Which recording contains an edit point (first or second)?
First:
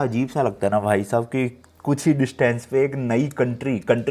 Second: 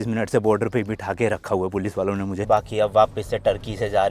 second